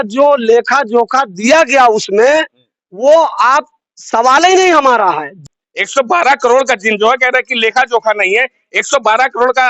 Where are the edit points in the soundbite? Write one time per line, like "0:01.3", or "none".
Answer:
0:05.4